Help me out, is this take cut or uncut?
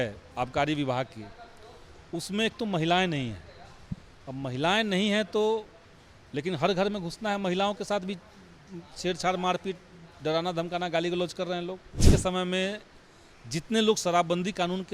cut